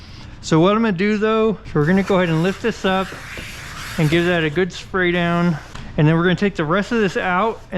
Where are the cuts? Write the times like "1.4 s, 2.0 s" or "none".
1.6 s, 5.7 s